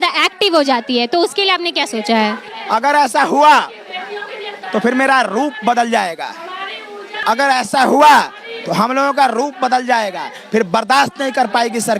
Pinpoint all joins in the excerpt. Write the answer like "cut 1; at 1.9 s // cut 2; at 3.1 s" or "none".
cut 1; at 2.5 s // cut 2; at 7.1 s

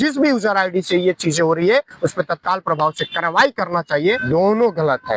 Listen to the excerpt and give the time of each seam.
cut 1; at 4.2 s

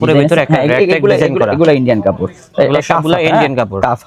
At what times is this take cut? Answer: none

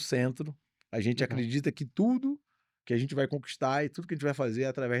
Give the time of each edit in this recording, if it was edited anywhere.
none

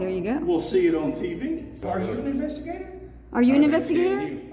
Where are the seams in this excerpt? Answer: cut 1; at 1.7 s

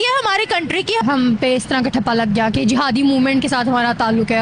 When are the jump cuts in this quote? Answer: cut 1; at 1.0 s

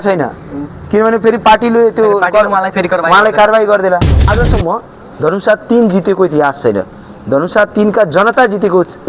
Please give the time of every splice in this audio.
cut 1; at 4.3 s

